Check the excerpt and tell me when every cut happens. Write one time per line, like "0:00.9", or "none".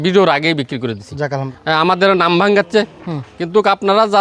0:01.5